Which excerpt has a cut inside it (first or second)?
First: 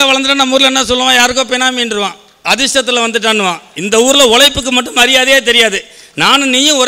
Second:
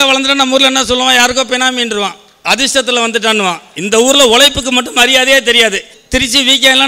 second